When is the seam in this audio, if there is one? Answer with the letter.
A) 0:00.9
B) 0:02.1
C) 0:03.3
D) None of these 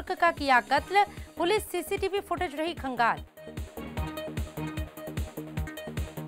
C